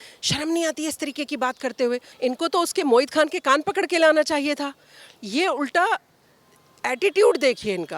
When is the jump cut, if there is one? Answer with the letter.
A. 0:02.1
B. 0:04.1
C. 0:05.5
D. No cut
A